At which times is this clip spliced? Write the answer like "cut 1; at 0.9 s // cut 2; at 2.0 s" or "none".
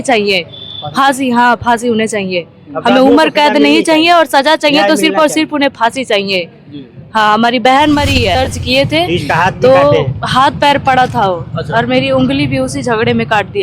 cut 1; at 8.4 s